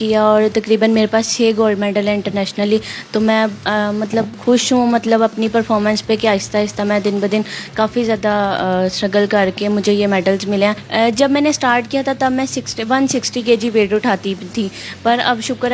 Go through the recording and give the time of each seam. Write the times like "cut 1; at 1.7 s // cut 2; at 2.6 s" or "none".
none

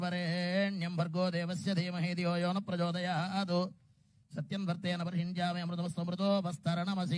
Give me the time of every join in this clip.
cut 1; at 4.7 s

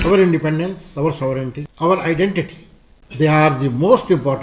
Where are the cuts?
cut 1; at 1.6 s

